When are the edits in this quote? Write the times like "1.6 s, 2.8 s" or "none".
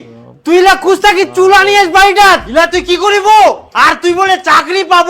2.5 s

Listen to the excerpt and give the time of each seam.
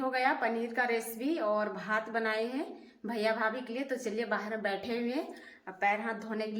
none

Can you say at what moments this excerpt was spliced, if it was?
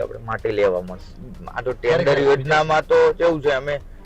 1.2 s

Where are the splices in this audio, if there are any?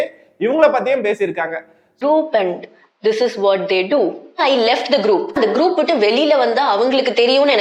none

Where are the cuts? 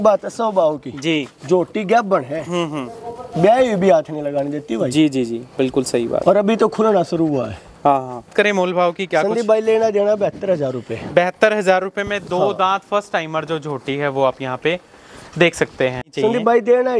8.3 s, 16.1 s

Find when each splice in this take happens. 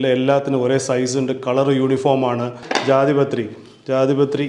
2.7 s

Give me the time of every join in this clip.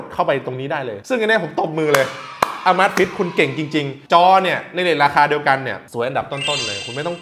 4.0 s

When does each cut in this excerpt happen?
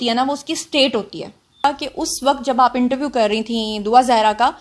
1.6 s

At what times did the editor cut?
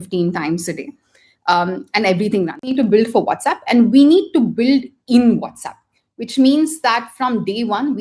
2.8 s

